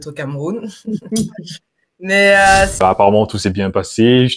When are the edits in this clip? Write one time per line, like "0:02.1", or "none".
0:02.8